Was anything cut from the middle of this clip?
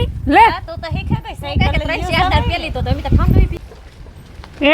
yes; 1 cut; at 3.5 s

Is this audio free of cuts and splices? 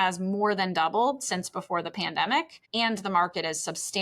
no; 1 cut; at 2.6 s

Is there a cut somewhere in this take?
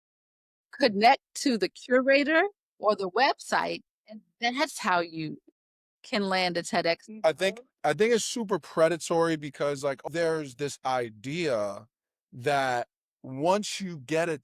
yes; 2 cuts; at 7.1 s, 10.0 s

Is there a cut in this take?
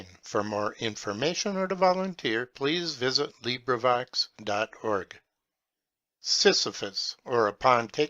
yes; 1 cut; at 6.4 s

